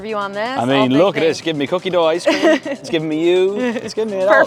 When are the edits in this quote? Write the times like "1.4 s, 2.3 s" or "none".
none